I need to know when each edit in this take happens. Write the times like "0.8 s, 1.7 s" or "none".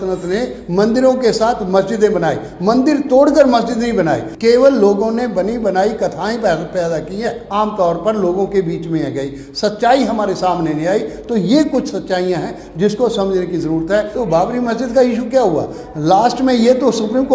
4.3 s, 7.4 s, 14.1 s